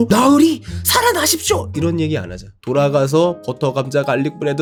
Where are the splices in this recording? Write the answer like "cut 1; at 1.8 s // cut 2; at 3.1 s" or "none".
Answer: none